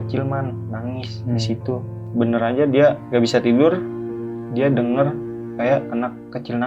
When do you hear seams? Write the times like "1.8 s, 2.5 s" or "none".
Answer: 2.1 s, 3.0 s